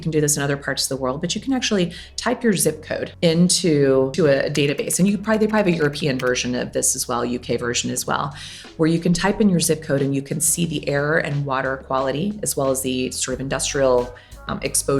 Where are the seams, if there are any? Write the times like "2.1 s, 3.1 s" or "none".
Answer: 3.1 s, 4.1 s